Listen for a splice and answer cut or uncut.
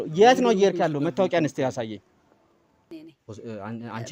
cut